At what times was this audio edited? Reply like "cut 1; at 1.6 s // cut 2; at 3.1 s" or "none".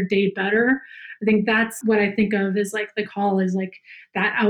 cut 1; at 1.7 s